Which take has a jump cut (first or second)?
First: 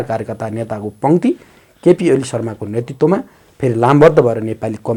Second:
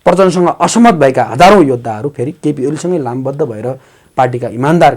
second